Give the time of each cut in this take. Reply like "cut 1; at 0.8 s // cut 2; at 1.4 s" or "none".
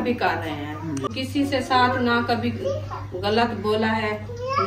cut 1; at 1.1 s